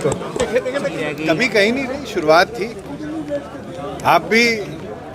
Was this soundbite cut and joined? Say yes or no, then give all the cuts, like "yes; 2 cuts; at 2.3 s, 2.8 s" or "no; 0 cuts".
yes; 1 cut; at 1.1 s